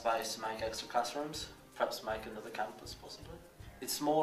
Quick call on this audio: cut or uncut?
cut